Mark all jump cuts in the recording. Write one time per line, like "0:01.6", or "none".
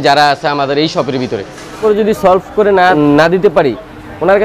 0:01.8
0:02.9